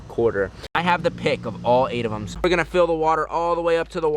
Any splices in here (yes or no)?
yes